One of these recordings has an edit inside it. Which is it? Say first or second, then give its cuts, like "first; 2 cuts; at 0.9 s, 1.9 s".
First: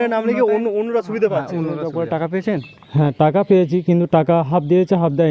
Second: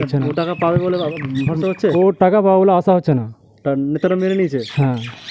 first; 1 cut; at 1.9 s